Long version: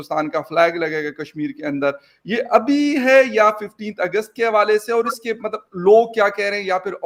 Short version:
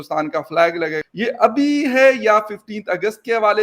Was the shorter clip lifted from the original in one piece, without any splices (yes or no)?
no